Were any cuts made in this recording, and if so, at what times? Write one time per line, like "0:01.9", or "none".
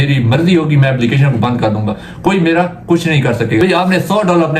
0:03.6